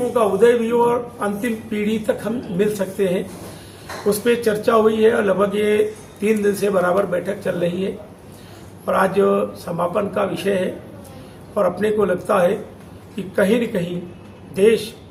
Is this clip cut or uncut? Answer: uncut